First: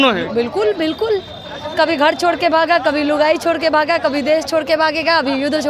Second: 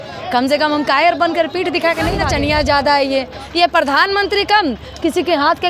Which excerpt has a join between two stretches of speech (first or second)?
second